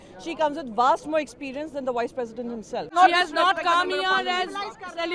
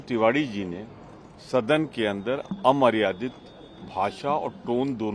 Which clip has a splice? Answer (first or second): first